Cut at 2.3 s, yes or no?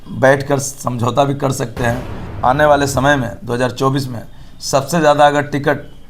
yes